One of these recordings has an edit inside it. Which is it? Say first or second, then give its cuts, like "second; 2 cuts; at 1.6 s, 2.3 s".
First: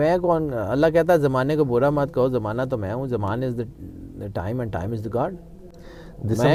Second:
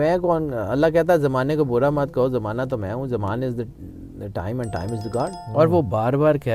second; 1 cut; at 5.4 s